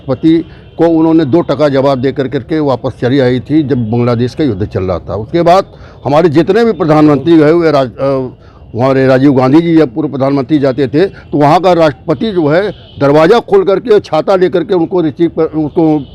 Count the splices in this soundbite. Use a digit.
0